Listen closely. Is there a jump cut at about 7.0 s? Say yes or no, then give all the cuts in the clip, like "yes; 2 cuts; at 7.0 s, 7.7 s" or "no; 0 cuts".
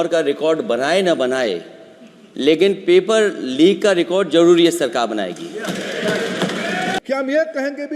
yes; 1 cut; at 7.0 s